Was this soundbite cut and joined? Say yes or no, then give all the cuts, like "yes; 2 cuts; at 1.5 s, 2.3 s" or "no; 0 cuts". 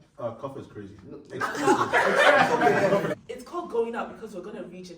yes; 1 cut; at 3.2 s